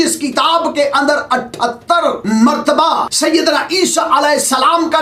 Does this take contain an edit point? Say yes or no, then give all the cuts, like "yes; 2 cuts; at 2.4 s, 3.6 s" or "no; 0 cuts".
yes; 2 cuts; at 2.2 s, 3.1 s